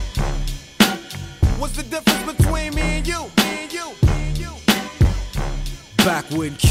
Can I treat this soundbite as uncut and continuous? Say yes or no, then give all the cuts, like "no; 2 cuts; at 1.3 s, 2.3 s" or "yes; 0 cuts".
no; 1 cut; at 1.5 s